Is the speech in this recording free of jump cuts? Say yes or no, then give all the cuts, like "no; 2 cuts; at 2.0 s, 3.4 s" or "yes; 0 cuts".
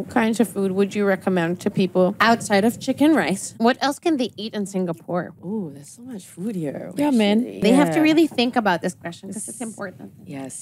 no; 4 cuts; at 2.2 s, 3.4 s, 5.4 s, 7.6 s